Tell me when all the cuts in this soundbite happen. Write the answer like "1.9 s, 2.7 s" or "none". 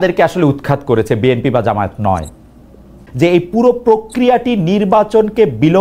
3.0 s